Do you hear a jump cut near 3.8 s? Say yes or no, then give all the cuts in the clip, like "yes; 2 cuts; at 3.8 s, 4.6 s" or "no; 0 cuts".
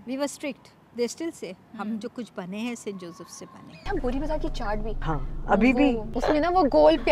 yes; 3 cuts; at 3.8 s, 4.9 s, 6.1 s